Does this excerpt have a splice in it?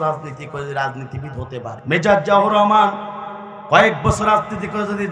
yes; 1 cut; at 1.8 s

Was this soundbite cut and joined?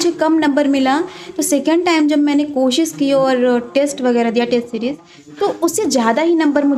no; 0 cuts

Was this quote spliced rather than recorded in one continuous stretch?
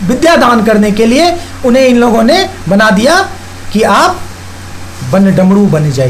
no; 0 cuts

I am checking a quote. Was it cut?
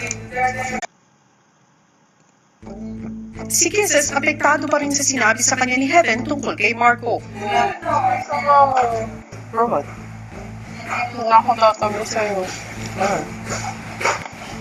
no; 0 cuts

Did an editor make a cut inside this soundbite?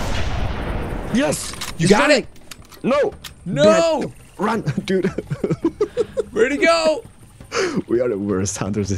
no; 0 cuts

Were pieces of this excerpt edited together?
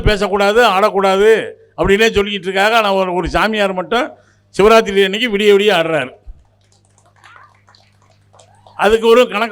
no; 0 cuts

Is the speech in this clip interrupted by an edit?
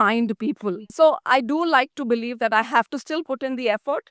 yes; 1 cut; at 0.9 s

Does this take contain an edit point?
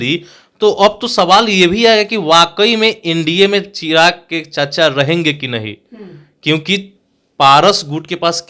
no; 0 cuts

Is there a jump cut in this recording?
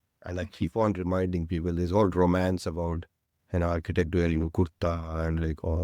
no; 0 cuts

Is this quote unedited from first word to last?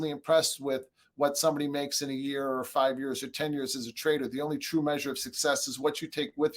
yes; 0 cuts

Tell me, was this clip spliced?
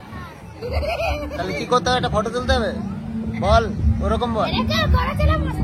no; 0 cuts

